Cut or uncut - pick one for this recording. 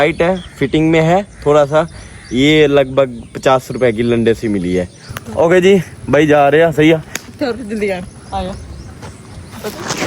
cut